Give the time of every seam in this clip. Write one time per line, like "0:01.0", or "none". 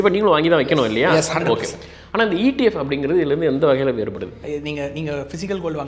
0:04.3